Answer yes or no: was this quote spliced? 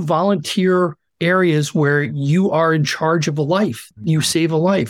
yes